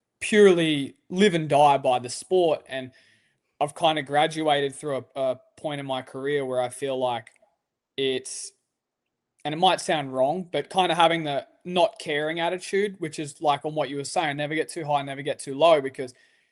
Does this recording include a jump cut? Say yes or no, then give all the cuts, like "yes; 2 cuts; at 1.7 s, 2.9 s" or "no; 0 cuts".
no; 0 cuts